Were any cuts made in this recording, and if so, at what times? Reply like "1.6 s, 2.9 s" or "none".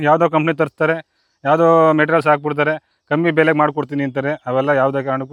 none